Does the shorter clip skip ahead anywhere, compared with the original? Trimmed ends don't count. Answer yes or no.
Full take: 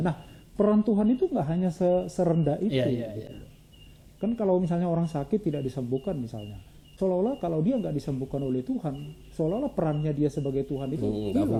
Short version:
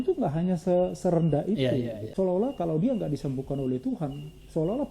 yes